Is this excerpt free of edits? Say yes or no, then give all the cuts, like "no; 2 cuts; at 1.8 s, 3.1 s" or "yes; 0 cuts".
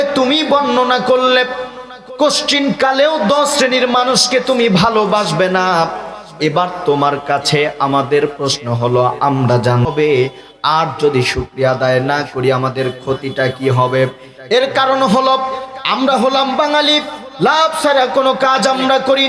no; 1 cut; at 9.9 s